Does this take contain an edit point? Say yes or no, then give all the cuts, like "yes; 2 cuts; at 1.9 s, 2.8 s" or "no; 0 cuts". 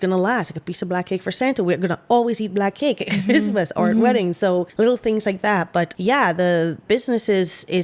yes; 3 cuts; at 4.7 s, 5.9 s, 6.8 s